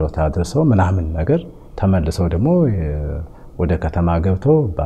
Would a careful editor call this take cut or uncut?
uncut